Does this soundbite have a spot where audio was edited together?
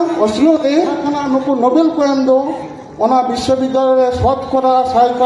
yes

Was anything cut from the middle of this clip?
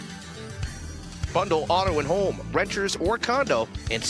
yes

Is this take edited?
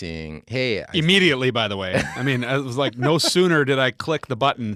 no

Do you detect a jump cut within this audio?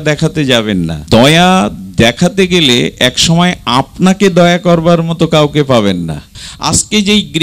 yes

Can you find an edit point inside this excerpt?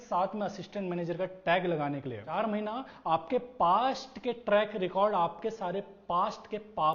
yes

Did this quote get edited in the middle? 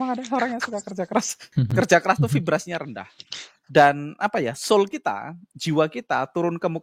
yes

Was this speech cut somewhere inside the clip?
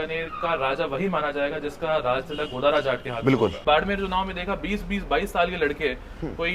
yes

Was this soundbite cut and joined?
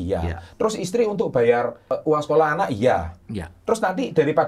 yes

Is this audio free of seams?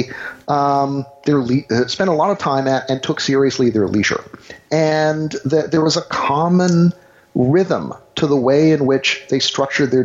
yes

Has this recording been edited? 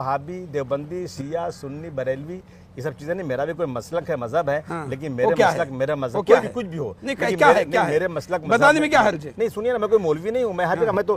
no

